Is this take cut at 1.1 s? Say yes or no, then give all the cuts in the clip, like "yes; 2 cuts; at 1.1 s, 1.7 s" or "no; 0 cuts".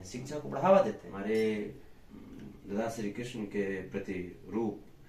yes; 1 cut; at 1.1 s